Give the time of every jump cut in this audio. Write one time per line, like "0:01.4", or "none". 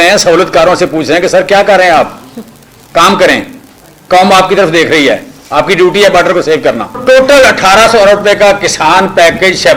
0:07.0